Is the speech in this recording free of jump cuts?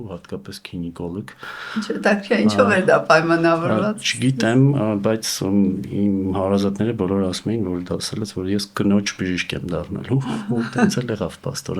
yes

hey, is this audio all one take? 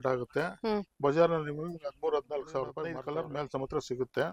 no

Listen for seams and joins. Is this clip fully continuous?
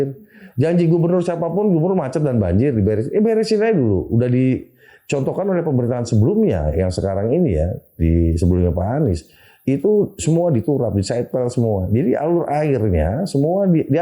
yes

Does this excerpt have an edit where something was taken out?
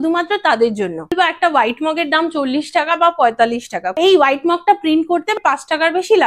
yes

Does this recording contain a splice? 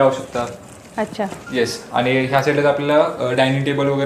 no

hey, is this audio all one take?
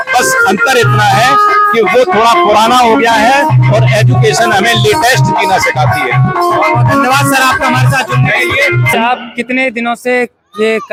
yes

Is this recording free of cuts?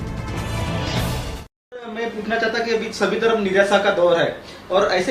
no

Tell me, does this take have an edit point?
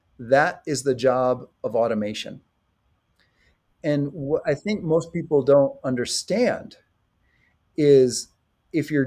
no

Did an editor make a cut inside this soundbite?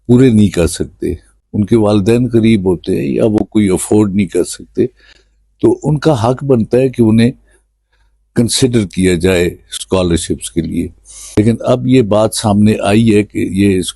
yes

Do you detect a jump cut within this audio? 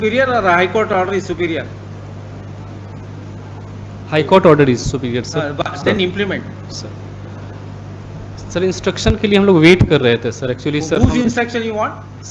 no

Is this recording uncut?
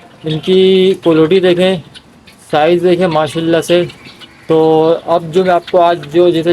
yes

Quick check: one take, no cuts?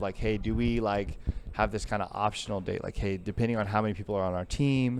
yes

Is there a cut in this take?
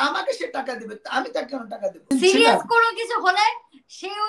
yes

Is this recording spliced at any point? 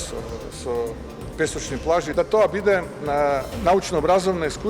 yes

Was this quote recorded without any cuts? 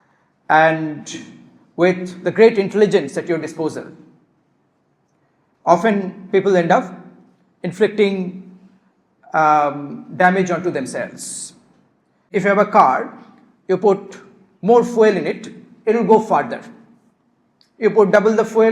no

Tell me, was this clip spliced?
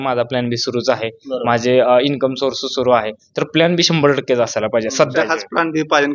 yes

